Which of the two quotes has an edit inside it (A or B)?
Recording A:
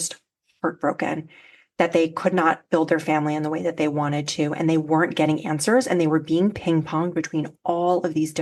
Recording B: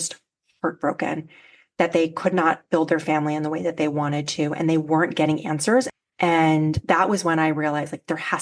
B